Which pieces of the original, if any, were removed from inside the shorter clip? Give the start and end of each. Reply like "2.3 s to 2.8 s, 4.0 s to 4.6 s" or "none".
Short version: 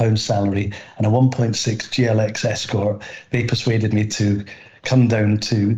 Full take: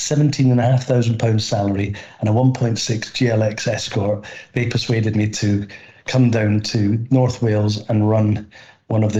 none

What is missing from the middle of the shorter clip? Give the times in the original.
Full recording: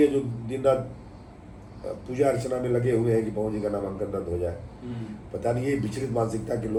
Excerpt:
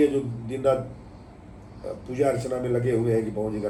none

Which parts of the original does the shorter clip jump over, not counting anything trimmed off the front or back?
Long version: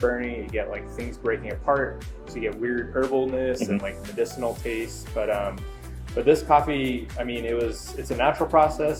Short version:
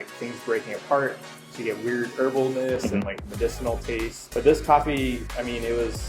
5.0 s to 6.0 s

